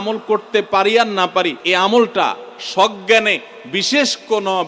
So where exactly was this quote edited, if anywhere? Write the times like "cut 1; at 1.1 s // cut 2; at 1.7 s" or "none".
cut 1; at 1.6 s